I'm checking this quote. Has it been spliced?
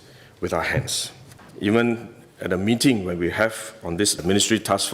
yes; 1 cut; at 1.4 s

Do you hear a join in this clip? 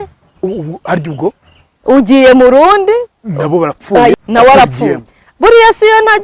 yes; 1 cut; at 4.1 s

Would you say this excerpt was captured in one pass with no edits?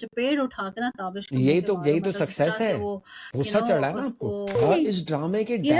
no; 1 cut; at 4.6 s

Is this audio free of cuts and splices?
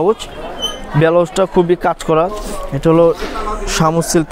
no; 1 cut; at 2.3 s

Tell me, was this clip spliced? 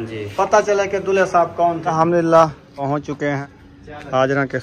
yes; 3 cuts; at 1.9 s, 2.8 s, 3.6 s

